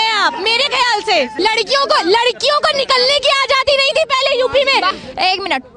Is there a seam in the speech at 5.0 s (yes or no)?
yes